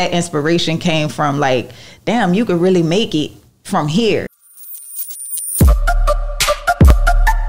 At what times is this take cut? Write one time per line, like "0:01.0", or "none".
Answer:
0:04.4